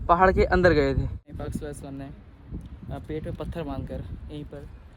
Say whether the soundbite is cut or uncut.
cut